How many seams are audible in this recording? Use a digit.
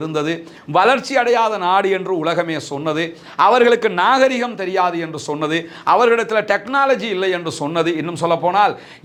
0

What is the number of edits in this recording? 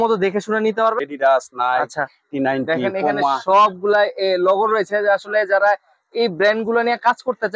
1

